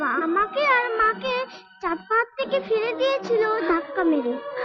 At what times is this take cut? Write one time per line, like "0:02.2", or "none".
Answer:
none